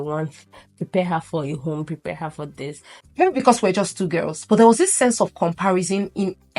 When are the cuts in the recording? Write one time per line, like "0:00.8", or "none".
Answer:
0:02.9